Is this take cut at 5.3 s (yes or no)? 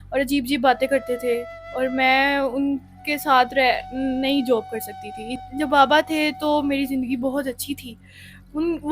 yes